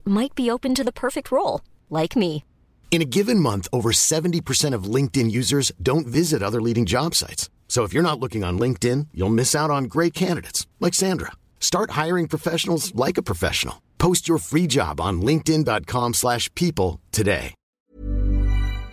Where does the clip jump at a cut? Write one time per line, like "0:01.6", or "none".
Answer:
0:17.6